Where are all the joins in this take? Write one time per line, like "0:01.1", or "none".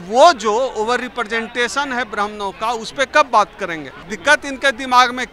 0:04.0